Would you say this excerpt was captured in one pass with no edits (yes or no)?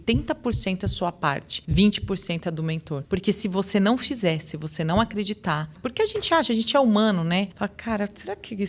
no